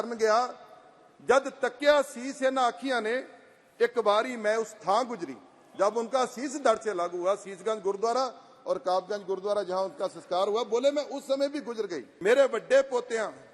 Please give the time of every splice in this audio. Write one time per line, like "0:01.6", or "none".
0:12.1